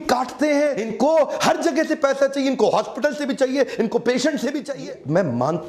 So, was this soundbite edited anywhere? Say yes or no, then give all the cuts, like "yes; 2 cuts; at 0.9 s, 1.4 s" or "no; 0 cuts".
yes; 2 cuts; at 0.8 s, 4.6 s